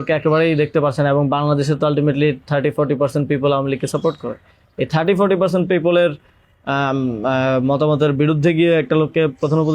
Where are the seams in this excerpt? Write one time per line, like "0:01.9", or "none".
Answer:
none